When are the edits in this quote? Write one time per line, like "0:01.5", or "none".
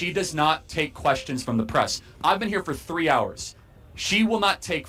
none